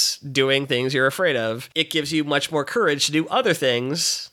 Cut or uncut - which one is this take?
cut